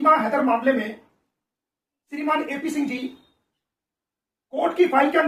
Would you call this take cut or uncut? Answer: uncut